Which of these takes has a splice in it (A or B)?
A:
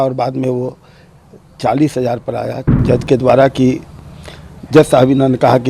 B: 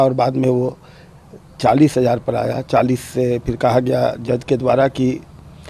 A